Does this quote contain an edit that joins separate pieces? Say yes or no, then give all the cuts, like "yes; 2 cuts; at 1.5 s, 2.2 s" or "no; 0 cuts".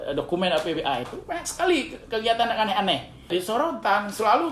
yes; 1 cut; at 3.3 s